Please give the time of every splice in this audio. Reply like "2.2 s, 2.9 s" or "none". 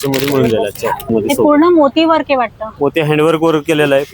1.1 s